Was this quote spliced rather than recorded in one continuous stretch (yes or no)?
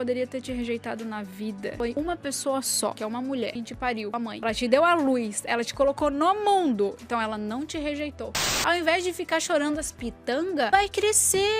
yes